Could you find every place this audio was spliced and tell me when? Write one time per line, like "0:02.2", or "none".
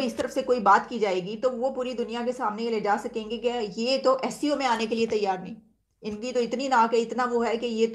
none